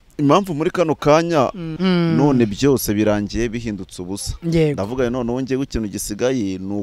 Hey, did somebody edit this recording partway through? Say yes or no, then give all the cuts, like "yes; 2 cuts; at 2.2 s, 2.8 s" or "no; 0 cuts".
yes; 1 cut; at 1.7 s